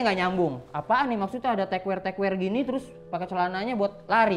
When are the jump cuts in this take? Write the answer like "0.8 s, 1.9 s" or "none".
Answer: none